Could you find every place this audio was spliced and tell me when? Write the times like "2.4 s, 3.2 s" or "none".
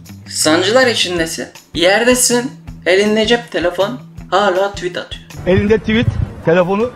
none

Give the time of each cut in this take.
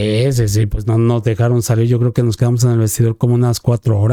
none

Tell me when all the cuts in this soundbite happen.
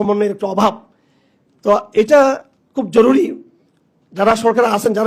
none

